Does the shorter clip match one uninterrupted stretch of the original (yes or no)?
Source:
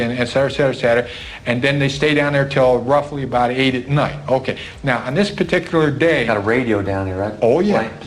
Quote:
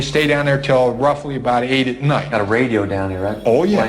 no